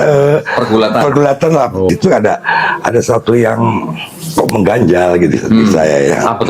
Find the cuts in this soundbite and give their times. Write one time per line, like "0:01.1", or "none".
0:01.9